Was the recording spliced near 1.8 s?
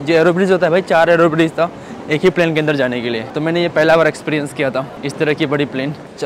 no; 0 cuts

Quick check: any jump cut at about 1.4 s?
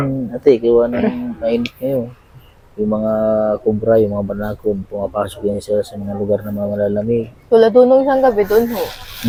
no; 0 cuts

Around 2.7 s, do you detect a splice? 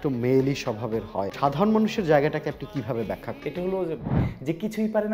no; 2 cuts; at 1.3 s, 4.2 s

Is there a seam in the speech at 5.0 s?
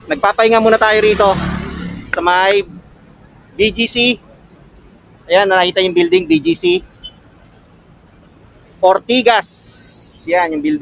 no; 0 cuts

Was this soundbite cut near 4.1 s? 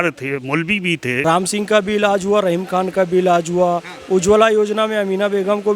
no; 1 cut; at 1.1 s

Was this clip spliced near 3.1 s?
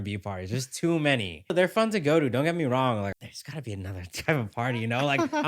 yes; 2 cuts; at 1.5 s, 3.1 s

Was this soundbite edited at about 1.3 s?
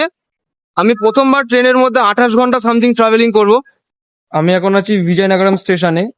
no; 1 cut; at 3.8 s

